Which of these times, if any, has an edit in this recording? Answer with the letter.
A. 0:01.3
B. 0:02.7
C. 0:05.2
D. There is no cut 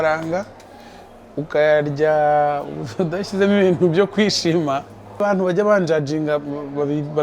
C